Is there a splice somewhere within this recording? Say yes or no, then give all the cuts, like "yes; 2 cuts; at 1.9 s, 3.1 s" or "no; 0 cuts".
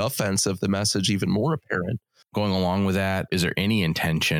yes; 2 cuts; at 2.3 s, 3.3 s